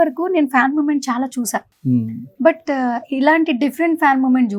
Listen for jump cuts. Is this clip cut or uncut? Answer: uncut